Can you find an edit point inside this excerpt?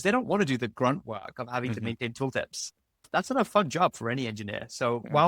yes; 1 cut; at 3.0 s

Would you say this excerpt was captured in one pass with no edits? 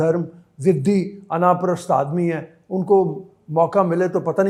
yes; 0 cuts

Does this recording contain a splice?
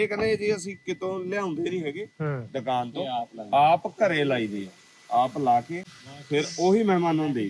no; 0 cuts

